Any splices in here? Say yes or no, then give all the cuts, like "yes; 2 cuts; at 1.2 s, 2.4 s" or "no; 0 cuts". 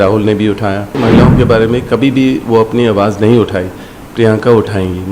yes; 1 cut; at 1.0 s